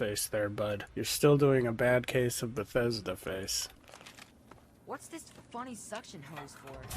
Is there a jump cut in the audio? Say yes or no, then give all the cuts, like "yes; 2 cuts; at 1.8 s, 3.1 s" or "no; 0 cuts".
yes; 2 cuts; at 0.9 s, 3.7 s